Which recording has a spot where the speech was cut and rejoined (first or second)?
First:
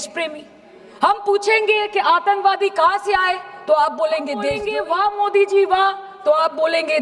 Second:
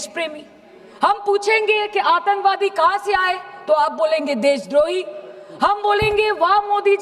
first